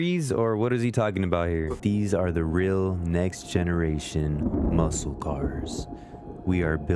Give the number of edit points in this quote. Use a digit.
1